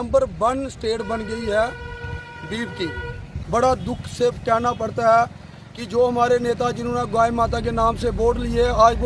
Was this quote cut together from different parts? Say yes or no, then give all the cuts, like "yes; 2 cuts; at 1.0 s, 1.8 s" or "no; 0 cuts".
yes; 1 cut; at 3.3 s